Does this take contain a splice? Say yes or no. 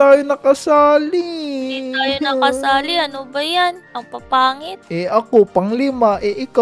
yes